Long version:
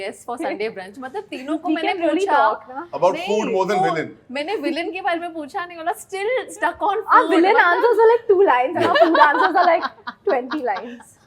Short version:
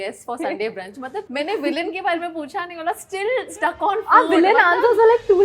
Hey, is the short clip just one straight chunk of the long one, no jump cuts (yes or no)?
no